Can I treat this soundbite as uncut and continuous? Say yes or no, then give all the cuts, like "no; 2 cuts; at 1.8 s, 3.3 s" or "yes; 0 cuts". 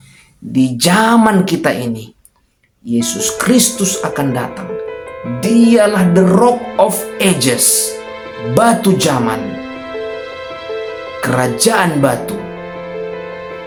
yes; 0 cuts